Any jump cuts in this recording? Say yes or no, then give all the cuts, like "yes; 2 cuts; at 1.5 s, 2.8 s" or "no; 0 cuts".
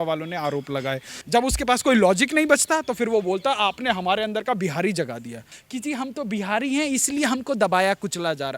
yes; 2 cuts; at 1.1 s, 5.6 s